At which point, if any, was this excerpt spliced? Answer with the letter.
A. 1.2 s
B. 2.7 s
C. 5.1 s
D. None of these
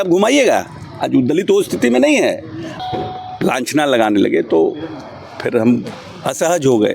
B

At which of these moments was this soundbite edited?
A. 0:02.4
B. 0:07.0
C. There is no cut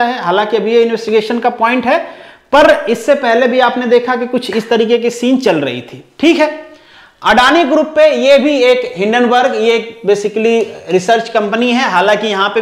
C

